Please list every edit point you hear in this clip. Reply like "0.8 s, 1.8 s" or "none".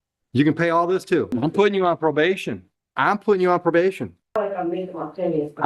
1.3 s, 4.4 s